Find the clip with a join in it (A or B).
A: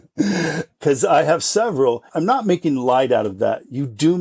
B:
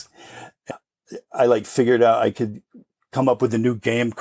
A